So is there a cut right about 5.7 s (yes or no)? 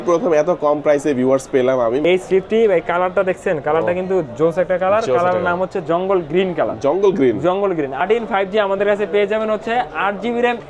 no